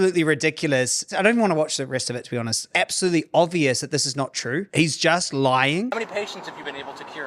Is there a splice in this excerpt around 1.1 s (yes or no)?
yes